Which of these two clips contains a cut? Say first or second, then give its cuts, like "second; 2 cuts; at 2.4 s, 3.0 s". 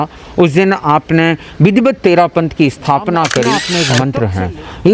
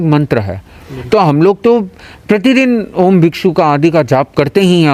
first; 1 cut; at 3.8 s